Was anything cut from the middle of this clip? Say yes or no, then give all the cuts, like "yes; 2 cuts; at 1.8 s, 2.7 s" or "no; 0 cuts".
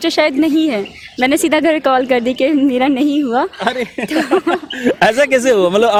no; 0 cuts